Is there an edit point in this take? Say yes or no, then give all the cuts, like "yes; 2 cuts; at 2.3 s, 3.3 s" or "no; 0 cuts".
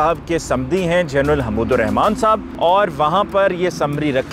yes; 1 cut; at 2.5 s